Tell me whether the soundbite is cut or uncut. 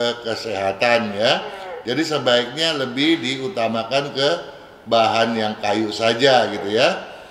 uncut